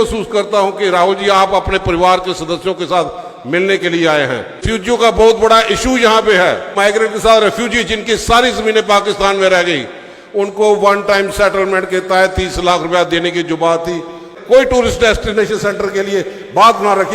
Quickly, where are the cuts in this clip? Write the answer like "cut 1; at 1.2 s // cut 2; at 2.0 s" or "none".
cut 1; at 4.6 s // cut 2; at 6.7 s // cut 3; at 14.3 s